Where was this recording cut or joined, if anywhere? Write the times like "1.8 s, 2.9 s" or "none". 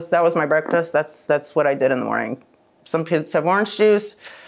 none